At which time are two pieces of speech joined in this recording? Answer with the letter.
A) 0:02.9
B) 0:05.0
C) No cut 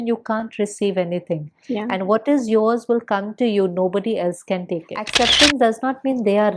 B